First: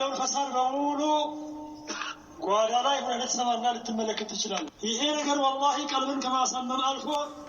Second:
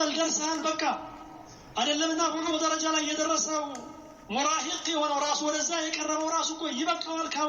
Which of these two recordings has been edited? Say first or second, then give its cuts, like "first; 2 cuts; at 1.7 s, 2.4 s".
first; 1 cut; at 4.7 s